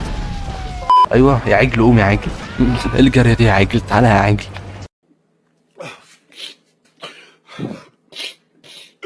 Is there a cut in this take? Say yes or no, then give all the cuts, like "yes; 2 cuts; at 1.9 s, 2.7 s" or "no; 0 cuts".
yes; 1 cut; at 1.0 s